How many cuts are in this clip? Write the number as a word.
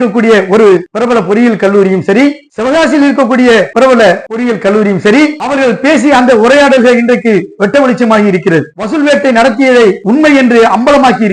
four